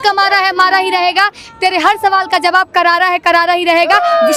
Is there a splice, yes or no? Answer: no